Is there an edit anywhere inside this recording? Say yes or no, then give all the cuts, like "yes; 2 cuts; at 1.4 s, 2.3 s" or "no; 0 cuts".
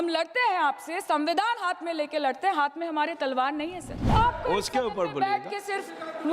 yes; 1 cut; at 4.0 s